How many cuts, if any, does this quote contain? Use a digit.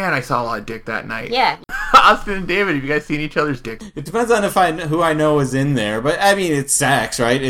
2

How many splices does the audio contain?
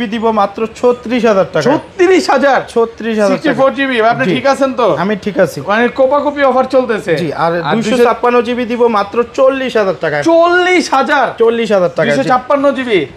0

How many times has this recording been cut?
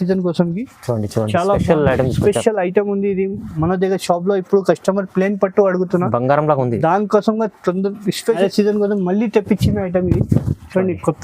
1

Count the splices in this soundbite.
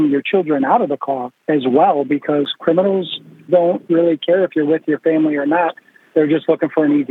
1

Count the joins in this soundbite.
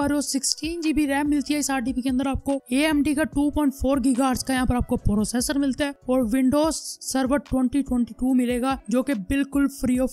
0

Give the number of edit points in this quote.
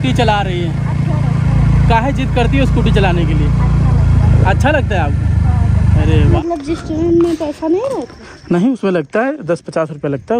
1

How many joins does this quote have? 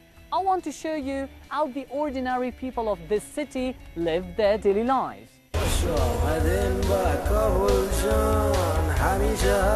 1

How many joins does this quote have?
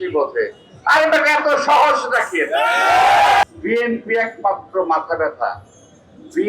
1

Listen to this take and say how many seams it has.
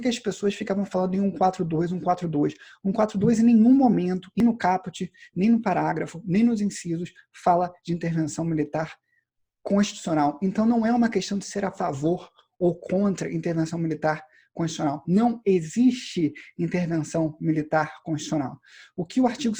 1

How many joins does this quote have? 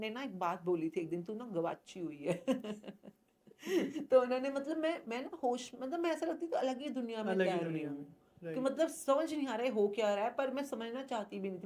0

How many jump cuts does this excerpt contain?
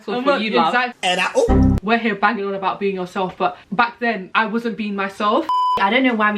3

